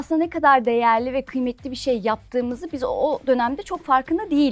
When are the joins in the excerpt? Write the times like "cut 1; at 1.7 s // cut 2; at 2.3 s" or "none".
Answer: none